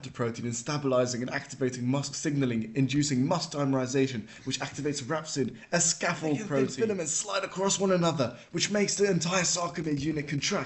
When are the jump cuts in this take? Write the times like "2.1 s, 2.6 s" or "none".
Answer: 6.7 s